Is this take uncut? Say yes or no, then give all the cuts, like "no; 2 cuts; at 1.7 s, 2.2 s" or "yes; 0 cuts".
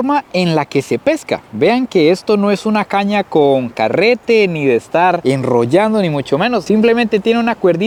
yes; 0 cuts